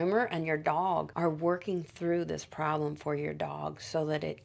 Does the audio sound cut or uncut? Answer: uncut